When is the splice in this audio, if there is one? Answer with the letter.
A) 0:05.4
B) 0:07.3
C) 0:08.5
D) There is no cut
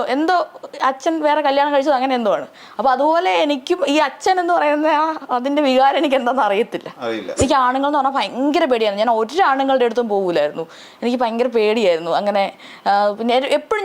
B